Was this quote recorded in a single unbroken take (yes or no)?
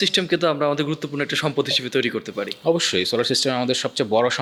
yes